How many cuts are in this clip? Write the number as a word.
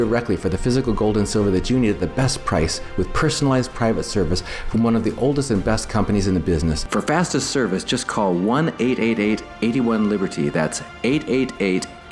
one